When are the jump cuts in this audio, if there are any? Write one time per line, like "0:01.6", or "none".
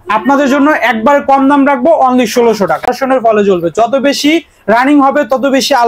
0:02.9